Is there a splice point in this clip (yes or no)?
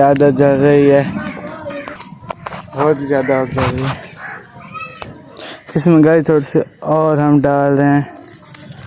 no